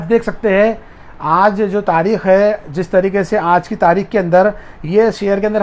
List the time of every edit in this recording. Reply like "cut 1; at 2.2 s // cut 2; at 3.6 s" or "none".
none

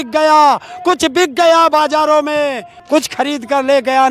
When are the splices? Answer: cut 1; at 2.8 s

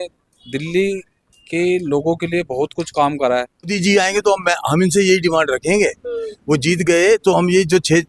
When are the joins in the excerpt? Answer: cut 1; at 3.7 s

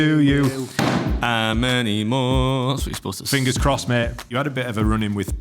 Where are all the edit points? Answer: cut 1; at 4.3 s

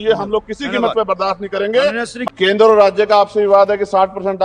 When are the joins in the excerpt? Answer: cut 1; at 2.2 s

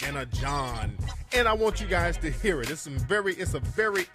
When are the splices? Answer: none

